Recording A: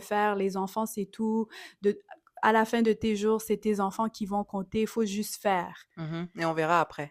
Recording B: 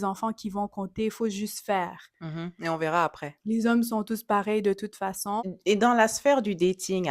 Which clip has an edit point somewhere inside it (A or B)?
B